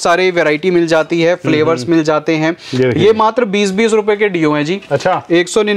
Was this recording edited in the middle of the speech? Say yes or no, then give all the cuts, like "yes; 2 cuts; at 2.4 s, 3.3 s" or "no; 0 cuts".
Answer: no; 0 cuts